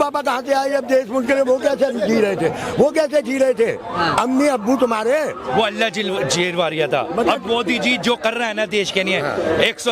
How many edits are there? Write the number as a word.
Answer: zero